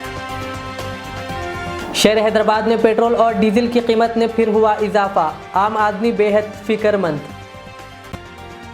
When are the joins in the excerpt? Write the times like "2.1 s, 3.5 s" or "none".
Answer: 1.7 s

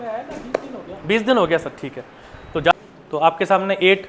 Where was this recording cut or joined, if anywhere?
2.7 s

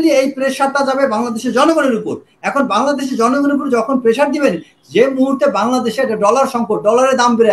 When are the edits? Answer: none

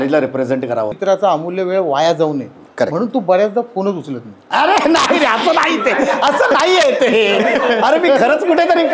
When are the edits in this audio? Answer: 0.9 s

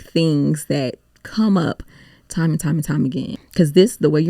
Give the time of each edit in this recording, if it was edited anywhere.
3.4 s

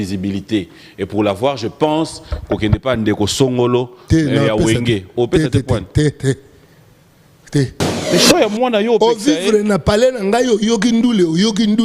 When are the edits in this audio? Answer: 7.9 s

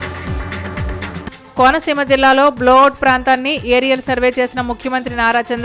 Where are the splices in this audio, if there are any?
1.1 s

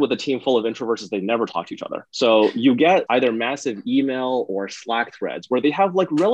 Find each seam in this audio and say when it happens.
2.0 s, 3.1 s

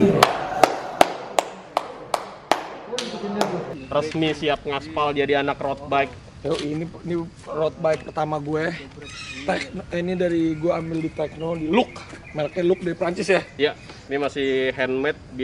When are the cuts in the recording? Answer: 3.7 s, 13.9 s

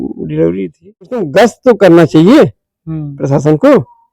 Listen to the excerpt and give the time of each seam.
1.3 s

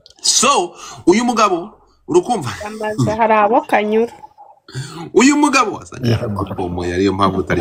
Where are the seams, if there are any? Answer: none

